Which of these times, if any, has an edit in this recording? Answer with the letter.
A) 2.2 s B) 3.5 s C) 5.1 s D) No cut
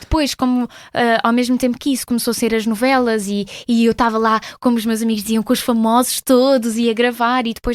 D